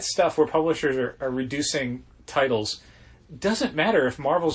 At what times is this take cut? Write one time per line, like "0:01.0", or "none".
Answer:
0:01.6